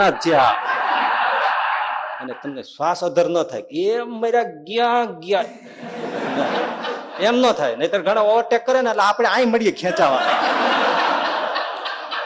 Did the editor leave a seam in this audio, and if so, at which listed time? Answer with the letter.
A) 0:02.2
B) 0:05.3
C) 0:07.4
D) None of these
A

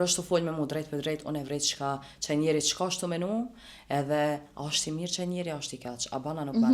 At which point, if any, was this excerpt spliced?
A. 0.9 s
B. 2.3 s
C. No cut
C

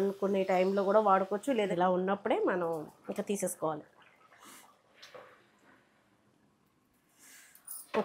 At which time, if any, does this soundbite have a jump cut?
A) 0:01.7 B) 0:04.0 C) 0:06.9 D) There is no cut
A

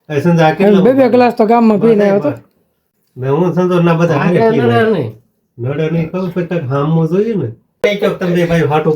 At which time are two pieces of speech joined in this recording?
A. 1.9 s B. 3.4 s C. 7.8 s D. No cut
C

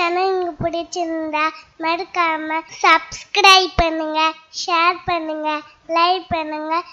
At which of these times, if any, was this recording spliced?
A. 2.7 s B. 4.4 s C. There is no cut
A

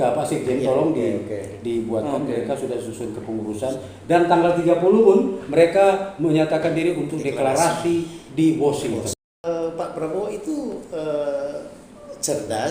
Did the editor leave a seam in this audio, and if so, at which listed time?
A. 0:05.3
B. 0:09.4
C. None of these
B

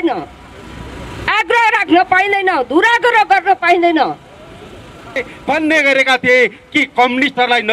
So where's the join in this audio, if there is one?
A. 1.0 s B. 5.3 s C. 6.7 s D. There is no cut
B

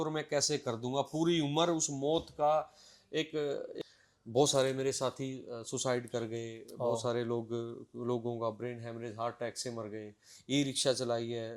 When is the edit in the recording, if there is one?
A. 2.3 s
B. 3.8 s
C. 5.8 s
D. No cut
B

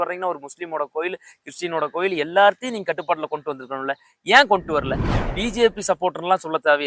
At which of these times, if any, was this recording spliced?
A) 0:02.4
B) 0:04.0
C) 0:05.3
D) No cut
C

